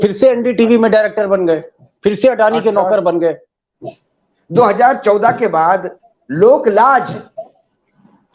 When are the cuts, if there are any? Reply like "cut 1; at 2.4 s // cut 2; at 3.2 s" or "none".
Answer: cut 1; at 4.1 s // cut 2; at 6.0 s